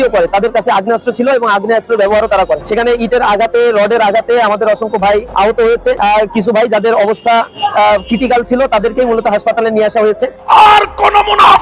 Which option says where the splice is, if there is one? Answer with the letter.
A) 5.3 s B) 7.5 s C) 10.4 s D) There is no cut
C